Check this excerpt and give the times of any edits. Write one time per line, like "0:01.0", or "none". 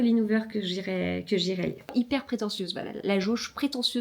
0:01.9